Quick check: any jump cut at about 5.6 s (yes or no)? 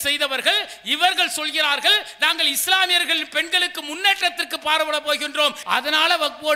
yes